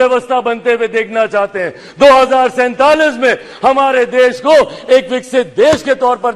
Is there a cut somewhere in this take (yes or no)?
no